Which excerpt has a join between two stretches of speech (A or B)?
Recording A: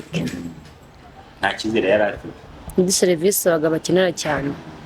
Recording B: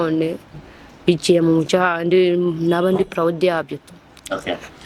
A